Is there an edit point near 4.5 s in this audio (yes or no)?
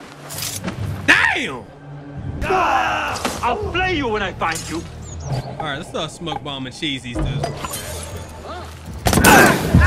no